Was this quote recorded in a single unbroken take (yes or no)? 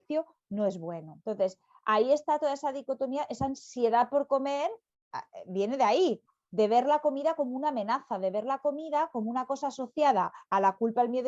no